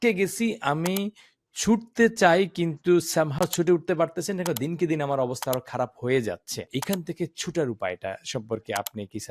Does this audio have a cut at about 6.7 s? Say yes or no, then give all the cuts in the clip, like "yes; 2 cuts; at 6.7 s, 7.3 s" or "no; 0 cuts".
yes; 1 cut; at 6.7 s